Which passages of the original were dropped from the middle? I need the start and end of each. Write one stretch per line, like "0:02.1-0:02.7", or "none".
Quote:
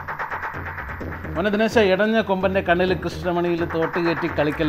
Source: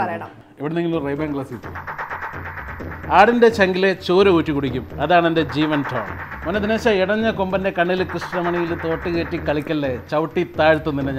0:02.9-0:06.2

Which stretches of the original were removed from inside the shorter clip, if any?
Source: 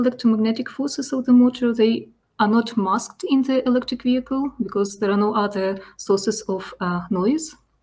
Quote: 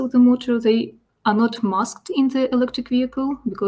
none

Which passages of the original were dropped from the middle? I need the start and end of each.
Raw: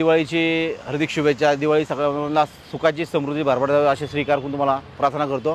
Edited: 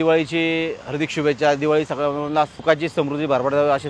0:02.5-0:02.7

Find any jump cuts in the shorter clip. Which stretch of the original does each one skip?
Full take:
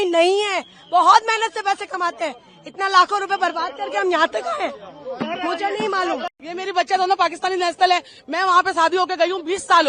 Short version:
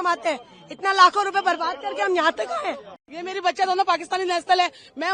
0:05.0-0:06.4

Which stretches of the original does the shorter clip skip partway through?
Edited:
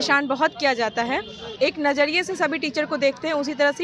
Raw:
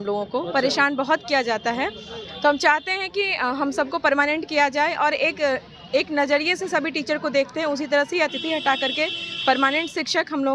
0:02.1-0:05.7

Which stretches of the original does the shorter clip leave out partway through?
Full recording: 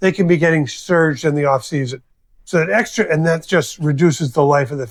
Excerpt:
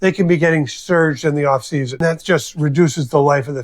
0:02.0-0:03.2

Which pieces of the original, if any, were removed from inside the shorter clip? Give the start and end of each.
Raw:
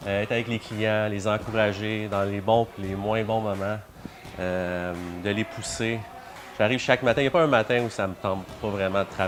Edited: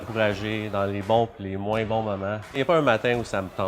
0:04.0-0:07.2

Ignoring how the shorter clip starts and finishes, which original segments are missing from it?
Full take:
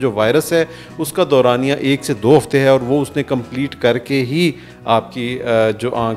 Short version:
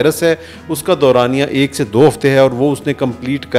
none

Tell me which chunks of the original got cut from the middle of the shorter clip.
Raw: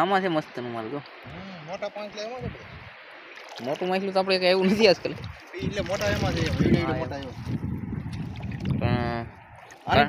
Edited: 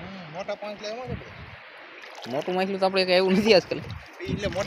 none

